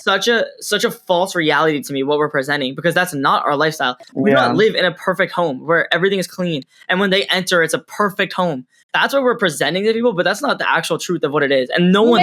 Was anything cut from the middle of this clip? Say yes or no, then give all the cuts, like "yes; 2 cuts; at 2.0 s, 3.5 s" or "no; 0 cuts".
no; 0 cuts